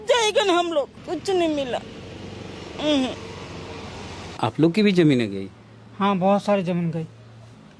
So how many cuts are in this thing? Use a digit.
2